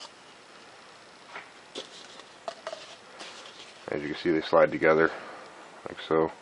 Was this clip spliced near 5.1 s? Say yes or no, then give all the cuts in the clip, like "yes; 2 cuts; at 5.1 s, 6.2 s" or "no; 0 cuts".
no; 1 cut; at 2.6 s